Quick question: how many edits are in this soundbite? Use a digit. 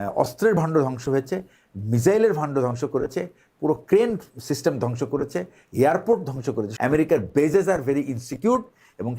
1